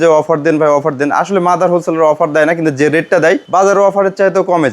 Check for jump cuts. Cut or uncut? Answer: cut